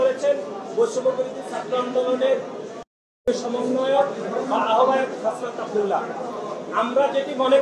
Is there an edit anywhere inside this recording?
no; 0 cuts

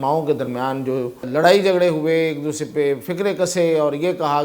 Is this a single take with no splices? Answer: no; 1 cut; at 1.3 s

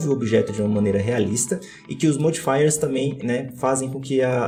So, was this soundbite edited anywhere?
no; 0 cuts

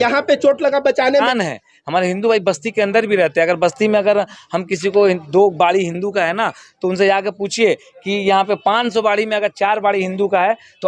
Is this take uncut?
no; 1 cut; at 1.2 s

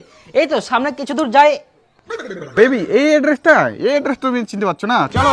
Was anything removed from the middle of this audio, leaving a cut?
yes; 1 cut; at 2.6 s

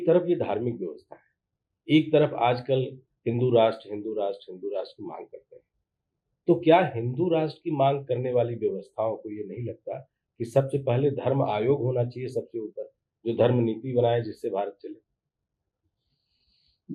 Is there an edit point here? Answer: no; 0 cuts

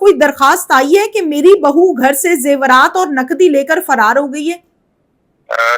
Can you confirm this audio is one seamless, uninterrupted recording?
yes; 0 cuts

